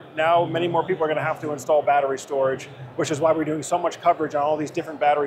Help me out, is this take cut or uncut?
uncut